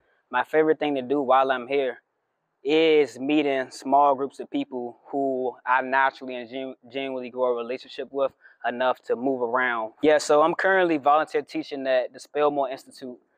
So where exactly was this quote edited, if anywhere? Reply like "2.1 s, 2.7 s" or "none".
9.9 s